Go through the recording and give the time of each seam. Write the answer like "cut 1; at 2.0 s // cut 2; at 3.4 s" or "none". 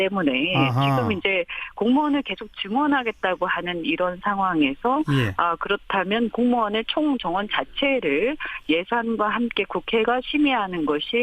cut 1; at 7.5 s